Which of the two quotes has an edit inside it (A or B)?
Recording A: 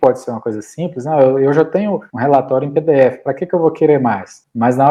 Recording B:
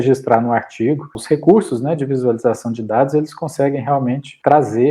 B